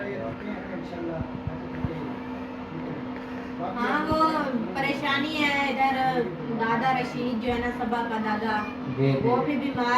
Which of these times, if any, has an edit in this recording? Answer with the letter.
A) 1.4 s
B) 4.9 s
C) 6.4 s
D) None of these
C